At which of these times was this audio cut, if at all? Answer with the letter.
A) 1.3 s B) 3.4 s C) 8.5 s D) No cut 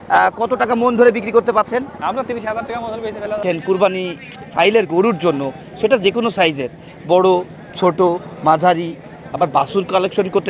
B